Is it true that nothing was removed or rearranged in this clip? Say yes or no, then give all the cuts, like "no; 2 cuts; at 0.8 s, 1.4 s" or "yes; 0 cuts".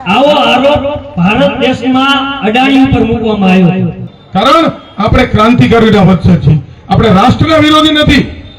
no; 1 cut; at 4.1 s